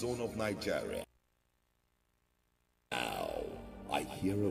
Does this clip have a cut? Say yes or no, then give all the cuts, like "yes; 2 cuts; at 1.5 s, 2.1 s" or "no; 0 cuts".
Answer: no; 0 cuts